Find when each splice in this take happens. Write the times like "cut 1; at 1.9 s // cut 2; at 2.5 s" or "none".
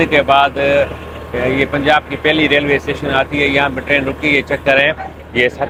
none